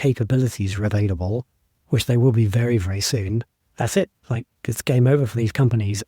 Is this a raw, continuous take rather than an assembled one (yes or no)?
no